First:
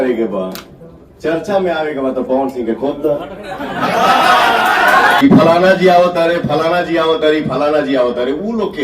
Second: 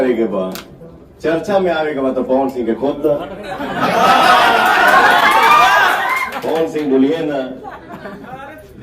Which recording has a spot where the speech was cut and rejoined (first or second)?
first